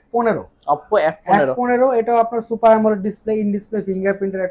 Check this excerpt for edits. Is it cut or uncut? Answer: uncut